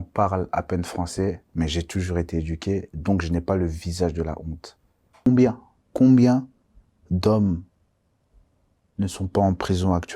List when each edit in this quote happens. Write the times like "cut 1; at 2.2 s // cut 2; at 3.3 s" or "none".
cut 1; at 5.3 s